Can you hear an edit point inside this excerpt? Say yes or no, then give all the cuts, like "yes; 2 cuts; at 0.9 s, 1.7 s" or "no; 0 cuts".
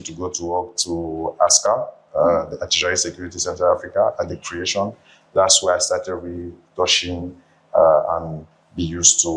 no; 0 cuts